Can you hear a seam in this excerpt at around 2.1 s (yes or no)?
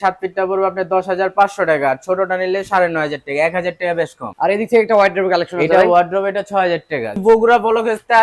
no